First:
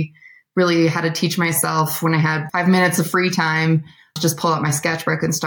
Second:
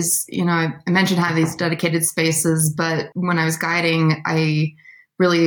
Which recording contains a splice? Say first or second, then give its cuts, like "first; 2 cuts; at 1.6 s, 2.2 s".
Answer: first; 1 cut; at 4.1 s